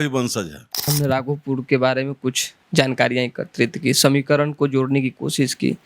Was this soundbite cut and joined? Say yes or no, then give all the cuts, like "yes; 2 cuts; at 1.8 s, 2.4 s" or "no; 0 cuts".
yes; 1 cut; at 0.9 s